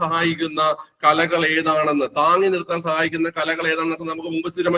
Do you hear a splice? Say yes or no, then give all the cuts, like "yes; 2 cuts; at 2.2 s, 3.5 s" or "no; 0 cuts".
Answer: no; 0 cuts